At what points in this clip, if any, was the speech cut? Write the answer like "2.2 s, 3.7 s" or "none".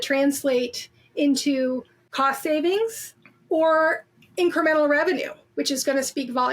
2.0 s